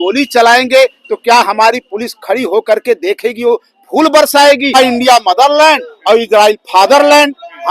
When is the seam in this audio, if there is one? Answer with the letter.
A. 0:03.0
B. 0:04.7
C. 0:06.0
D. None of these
B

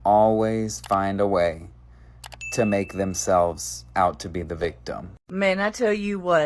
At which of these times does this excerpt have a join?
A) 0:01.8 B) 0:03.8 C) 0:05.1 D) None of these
C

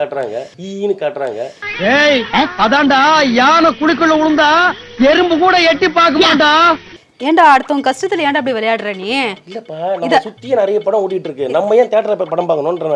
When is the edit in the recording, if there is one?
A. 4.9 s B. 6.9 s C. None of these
C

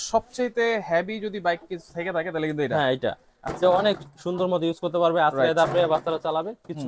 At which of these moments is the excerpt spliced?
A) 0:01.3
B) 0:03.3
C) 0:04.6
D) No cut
D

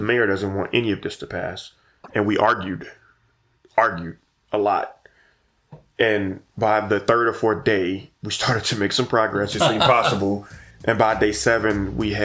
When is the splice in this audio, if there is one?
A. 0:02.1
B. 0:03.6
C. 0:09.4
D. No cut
A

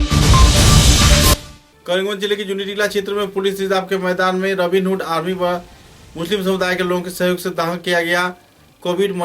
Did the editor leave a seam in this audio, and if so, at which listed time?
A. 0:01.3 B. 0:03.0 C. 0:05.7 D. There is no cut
A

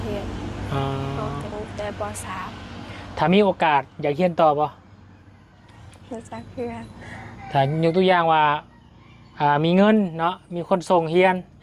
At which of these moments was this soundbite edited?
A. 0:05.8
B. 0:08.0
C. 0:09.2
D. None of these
D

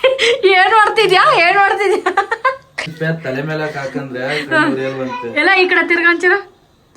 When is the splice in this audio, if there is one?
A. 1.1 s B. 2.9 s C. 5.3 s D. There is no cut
B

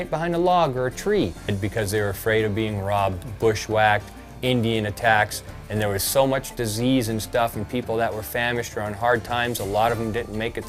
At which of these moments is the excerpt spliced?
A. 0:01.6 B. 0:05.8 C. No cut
A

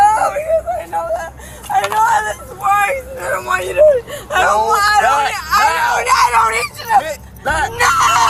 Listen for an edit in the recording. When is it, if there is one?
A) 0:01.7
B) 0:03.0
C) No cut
C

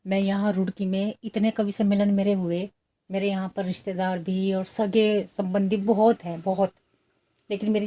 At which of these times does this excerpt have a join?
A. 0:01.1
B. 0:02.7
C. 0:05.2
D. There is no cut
D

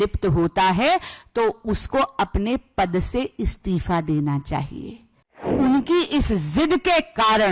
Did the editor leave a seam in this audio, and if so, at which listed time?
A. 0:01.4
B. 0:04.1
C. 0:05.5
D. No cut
C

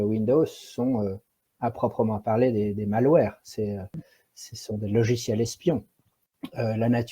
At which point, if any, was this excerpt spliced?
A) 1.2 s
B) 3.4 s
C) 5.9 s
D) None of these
C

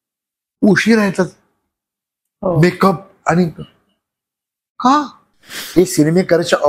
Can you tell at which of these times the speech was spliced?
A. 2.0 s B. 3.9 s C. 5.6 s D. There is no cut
C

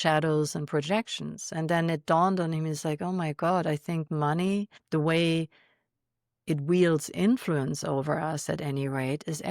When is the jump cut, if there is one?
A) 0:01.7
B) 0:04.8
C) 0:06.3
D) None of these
B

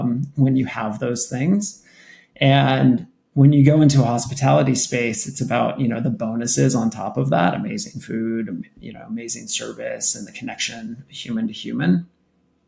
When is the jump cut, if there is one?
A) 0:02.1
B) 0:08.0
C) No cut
C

